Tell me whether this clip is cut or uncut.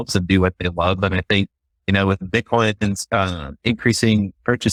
uncut